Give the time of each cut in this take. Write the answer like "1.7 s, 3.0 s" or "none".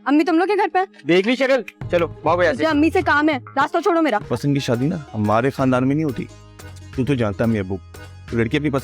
4.3 s